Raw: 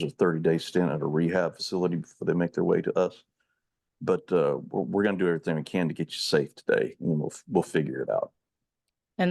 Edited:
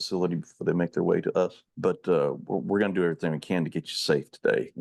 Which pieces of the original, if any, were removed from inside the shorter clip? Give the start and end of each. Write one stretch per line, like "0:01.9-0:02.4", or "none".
0:03.3-0:03.9